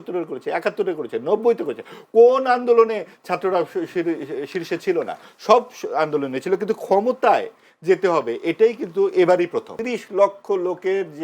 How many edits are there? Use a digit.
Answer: 1